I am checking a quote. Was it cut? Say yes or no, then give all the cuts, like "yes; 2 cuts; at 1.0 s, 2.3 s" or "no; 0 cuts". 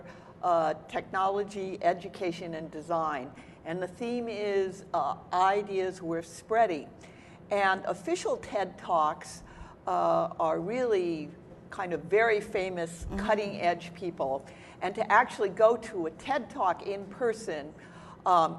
no; 0 cuts